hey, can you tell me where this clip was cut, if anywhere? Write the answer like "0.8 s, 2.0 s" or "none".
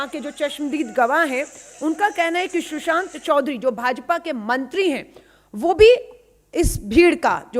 none